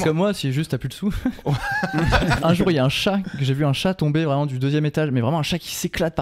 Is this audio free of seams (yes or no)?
no